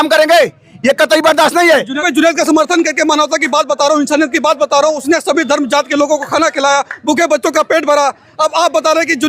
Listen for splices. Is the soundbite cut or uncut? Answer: cut